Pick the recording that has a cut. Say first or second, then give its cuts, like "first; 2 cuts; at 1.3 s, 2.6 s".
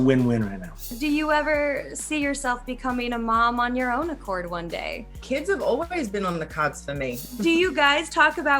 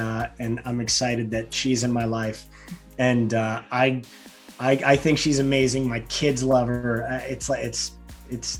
first; 3 cuts; at 0.9 s, 5.2 s, 7.2 s